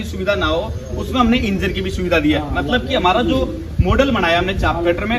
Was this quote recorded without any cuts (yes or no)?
yes